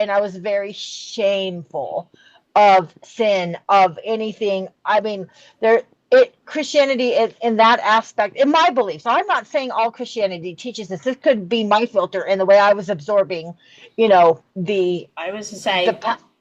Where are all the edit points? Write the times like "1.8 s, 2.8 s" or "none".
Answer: none